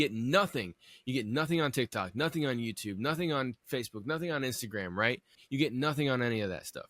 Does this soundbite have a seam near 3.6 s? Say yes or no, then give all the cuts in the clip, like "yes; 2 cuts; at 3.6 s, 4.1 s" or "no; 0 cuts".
no; 1 cut; at 5.4 s